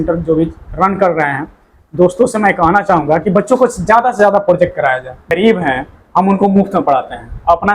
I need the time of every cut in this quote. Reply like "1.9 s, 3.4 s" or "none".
5.3 s